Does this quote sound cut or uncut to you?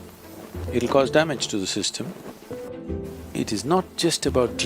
cut